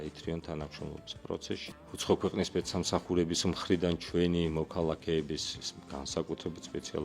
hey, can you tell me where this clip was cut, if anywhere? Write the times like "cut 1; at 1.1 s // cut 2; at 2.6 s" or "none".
cut 1; at 1.6 s